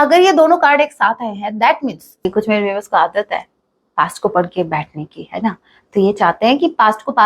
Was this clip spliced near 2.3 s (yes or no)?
yes